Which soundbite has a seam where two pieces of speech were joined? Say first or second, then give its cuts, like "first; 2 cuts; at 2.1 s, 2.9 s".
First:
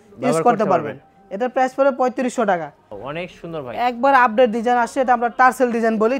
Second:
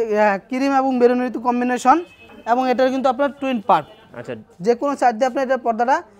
first; 1 cut; at 2.9 s